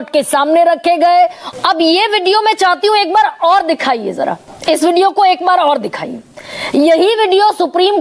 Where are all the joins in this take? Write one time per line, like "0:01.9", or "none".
0:01.4
0:04.5